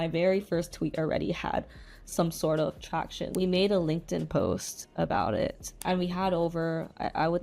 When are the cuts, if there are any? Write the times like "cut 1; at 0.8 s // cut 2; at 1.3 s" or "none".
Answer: cut 1; at 3.3 s // cut 2; at 5.7 s